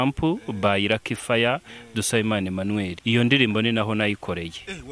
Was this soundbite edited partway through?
yes; 1 cut; at 3.0 s

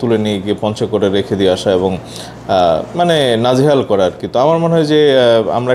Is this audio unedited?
yes; 0 cuts

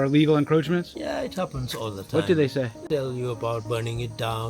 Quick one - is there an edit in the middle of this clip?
yes; 1 cut; at 2.9 s

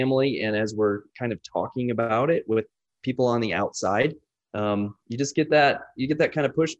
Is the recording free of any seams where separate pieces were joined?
yes; 0 cuts

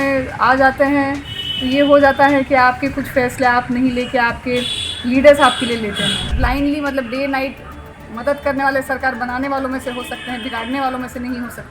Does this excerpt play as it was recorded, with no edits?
no; 1 cut; at 6.3 s

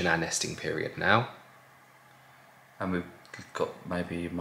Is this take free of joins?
yes; 0 cuts

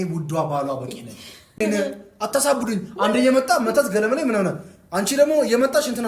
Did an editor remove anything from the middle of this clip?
yes; 1 cut; at 1.6 s

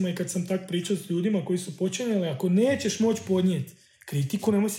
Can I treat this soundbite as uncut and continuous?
yes; 0 cuts

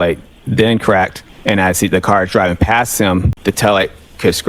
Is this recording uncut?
no; 2 cuts; at 1.3 s, 3.3 s

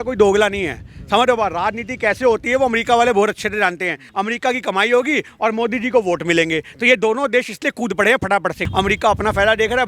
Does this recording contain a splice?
yes; 2 cuts; at 4.0 s, 8.6 s

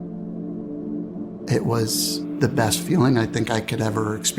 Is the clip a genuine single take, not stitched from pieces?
no; 1 cut; at 1.4 s

